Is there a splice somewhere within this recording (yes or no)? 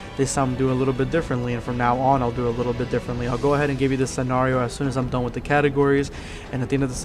yes